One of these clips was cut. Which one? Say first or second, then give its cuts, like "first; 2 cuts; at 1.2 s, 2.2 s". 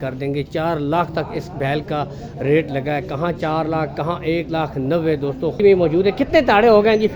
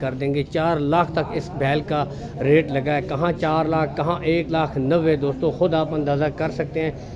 first; 1 cut; at 5.6 s